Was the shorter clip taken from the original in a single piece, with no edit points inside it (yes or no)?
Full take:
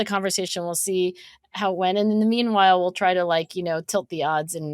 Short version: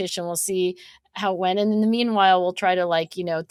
yes